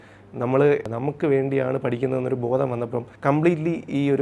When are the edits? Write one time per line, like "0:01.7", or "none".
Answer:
0:00.9
0:03.1

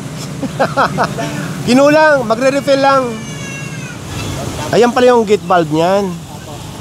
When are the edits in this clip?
0:04.0

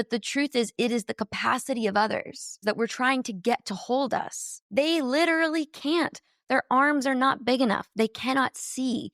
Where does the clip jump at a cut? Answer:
0:02.6

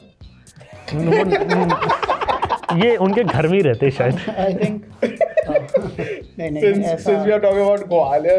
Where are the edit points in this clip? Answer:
none

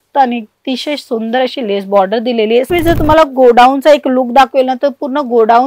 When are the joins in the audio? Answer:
0:02.7

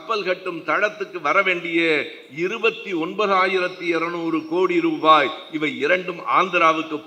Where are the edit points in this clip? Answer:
none

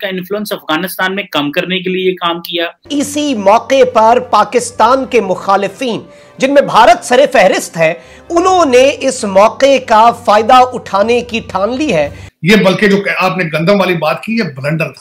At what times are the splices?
0:02.8
0:12.2

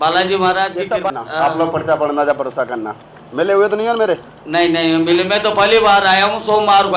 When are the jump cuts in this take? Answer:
0:01.1

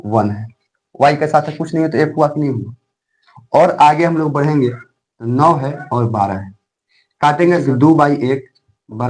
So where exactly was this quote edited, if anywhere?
0:07.6

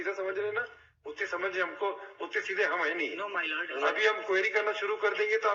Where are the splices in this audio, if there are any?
none

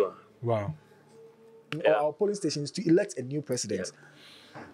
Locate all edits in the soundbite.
0:01.7

